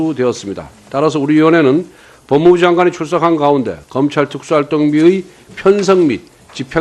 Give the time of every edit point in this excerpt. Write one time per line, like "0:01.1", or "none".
0:04.2